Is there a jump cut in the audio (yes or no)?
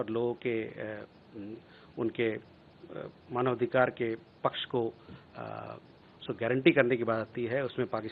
no